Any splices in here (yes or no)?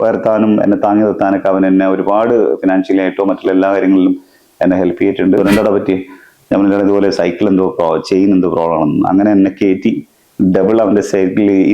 yes